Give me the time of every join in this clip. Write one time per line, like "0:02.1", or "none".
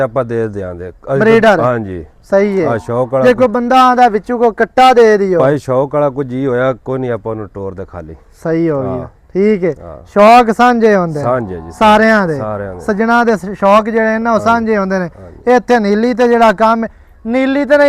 none